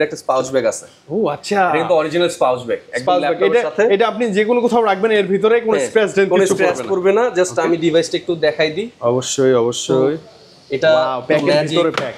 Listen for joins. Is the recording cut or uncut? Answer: uncut